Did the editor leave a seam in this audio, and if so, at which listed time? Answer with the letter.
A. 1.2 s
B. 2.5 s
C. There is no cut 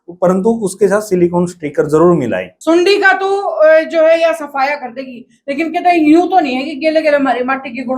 B